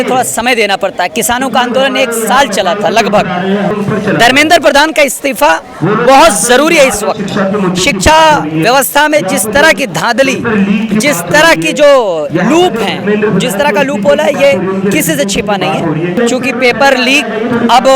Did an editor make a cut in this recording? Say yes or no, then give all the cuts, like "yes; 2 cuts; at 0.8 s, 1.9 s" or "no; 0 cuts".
yes; 2 cuts; at 3.7 s, 16.2 s